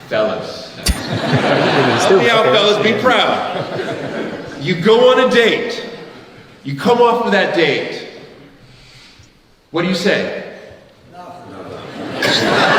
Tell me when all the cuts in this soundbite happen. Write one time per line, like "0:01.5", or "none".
none